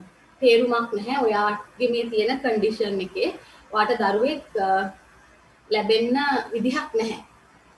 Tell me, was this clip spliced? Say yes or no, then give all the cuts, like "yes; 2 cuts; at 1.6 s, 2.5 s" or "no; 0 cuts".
no; 0 cuts